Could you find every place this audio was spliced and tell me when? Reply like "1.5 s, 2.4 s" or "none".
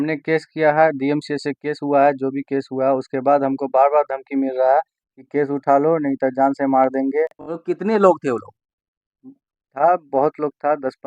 7.5 s

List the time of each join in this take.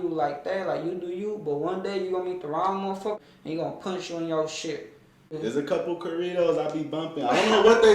3.2 s, 5.3 s

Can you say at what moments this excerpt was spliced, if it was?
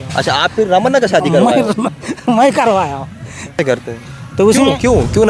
3.6 s

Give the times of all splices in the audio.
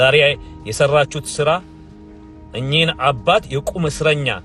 none

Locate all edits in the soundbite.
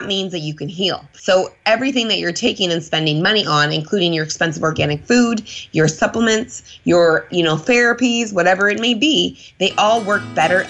1.1 s

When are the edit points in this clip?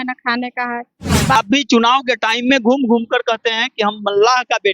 1.4 s

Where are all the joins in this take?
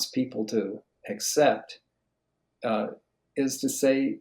none

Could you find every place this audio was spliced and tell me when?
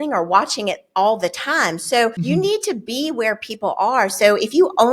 2.2 s

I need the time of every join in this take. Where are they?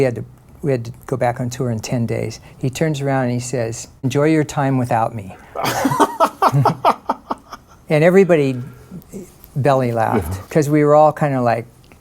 4.0 s, 10.4 s

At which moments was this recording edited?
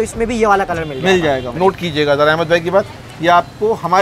1.5 s

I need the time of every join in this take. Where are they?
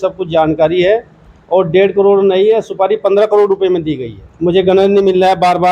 4.2 s

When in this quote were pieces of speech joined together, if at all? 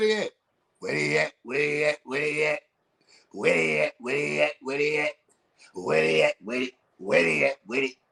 none

